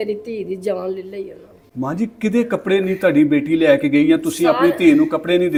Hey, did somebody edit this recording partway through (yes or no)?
no